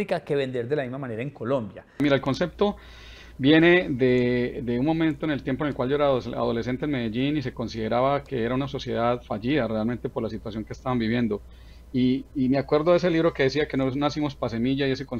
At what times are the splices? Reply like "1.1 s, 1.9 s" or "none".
2.0 s